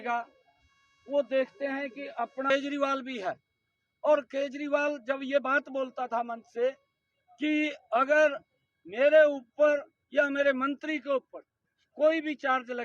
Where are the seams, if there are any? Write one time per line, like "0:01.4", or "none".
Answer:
0:02.5